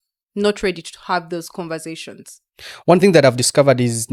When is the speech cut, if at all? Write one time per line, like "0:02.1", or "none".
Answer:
none